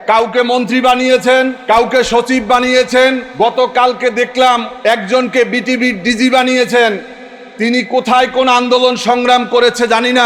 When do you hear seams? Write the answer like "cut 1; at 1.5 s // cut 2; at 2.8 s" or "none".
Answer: cut 1; at 1.6 s // cut 2; at 3.2 s // cut 3; at 4.7 s